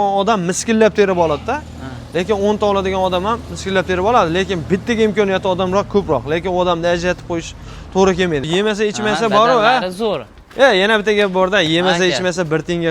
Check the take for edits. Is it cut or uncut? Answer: cut